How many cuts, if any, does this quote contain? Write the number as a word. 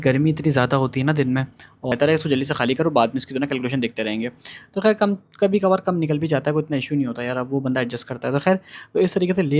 one